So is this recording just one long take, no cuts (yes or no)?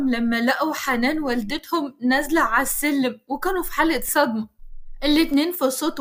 yes